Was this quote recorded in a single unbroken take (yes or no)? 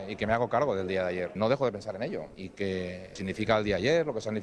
no